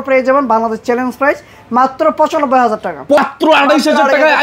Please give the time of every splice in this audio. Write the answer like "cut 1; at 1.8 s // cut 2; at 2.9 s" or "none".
cut 1; at 3.2 s